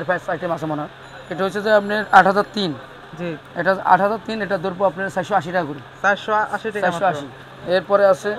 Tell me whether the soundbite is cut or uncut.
uncut